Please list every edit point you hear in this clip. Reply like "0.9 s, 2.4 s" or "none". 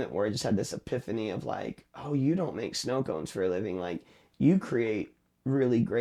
none